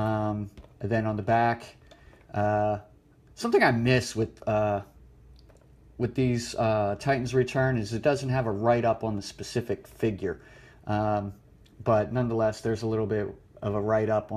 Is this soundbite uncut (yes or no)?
no